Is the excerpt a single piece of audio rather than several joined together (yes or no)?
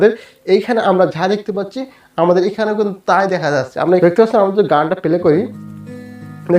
no